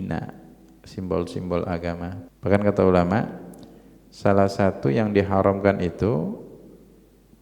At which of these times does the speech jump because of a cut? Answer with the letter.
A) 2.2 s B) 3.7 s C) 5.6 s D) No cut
A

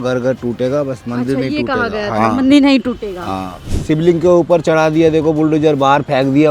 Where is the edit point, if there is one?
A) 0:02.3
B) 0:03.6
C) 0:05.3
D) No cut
B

